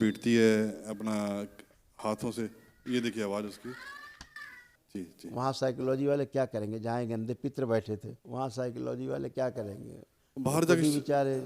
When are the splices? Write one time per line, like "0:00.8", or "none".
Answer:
0:04.7
0:08.2